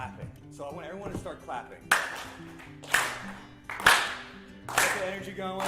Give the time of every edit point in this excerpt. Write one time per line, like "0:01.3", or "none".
0:02.8